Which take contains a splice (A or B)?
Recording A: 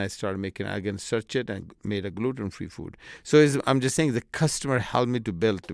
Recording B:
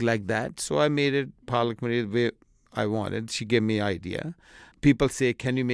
B